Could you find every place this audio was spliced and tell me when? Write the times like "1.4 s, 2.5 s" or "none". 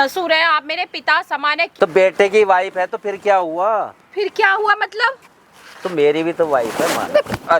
1.7 s